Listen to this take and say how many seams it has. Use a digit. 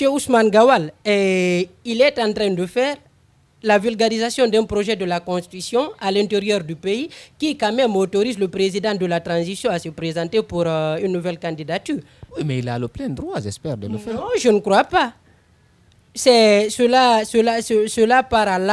0